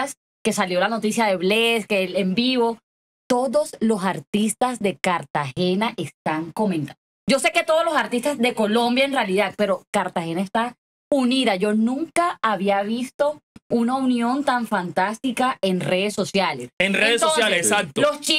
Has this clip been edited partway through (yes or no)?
no